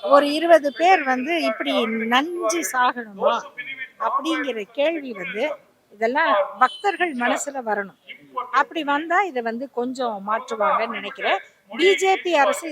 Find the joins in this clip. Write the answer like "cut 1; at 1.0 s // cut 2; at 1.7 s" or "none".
none